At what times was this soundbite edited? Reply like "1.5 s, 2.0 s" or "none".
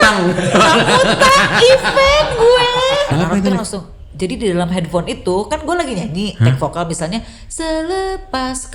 3.1 s